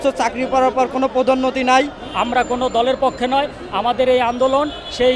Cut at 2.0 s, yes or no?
yes